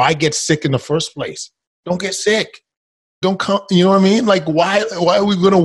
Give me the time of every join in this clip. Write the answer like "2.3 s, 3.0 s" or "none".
3.2 s